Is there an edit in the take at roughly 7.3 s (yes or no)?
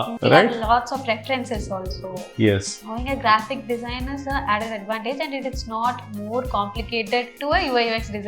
yes